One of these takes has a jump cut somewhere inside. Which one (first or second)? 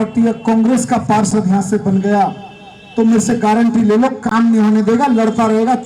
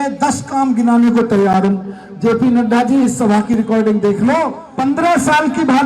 second